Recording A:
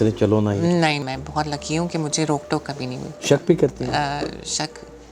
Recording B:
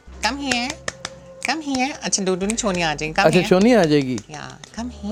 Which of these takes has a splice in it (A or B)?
A